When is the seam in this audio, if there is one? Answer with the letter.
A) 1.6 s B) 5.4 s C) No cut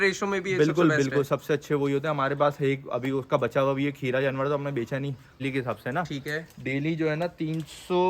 B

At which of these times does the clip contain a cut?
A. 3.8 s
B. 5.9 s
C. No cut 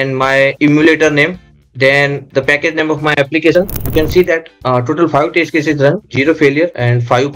A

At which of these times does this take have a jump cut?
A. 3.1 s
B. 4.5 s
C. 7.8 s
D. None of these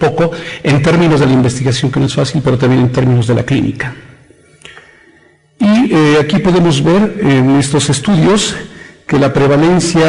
B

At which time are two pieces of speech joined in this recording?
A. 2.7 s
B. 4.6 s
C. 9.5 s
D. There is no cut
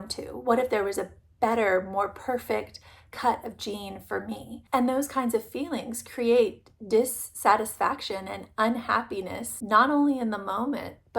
C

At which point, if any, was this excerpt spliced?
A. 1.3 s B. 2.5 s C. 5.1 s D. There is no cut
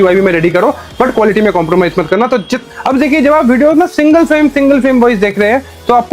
B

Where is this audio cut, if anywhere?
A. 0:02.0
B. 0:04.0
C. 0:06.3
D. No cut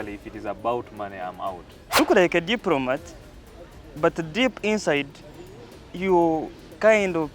A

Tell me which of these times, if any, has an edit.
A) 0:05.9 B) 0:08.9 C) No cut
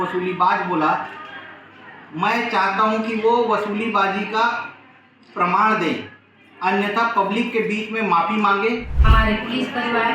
B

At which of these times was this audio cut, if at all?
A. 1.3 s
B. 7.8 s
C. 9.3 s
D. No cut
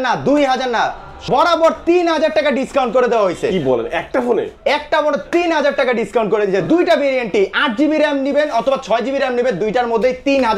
A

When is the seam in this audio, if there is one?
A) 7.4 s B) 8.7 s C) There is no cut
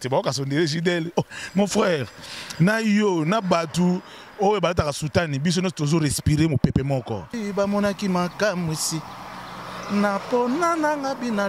A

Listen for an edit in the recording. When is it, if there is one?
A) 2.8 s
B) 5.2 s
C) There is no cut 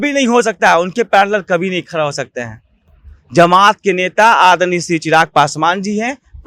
C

